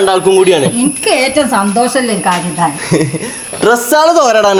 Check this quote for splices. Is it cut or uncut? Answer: uncut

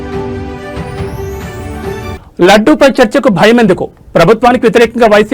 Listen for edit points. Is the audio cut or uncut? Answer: cut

